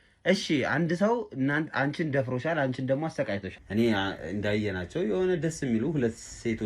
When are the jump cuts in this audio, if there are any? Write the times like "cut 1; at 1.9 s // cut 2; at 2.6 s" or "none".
cut 1; at 3.5 s